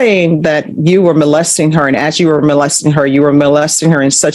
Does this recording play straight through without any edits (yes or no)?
yes